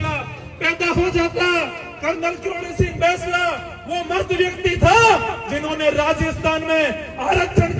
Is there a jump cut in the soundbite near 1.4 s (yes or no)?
no